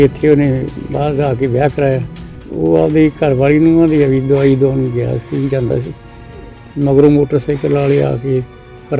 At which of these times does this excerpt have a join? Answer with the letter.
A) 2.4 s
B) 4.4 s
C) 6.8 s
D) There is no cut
A